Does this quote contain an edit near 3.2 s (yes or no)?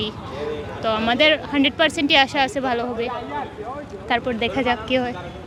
no